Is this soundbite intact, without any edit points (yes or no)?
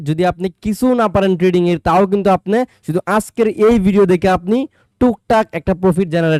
yes